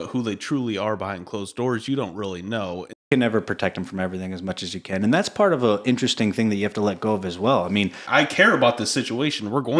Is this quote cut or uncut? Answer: cut